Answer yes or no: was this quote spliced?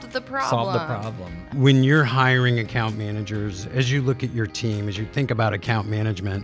yes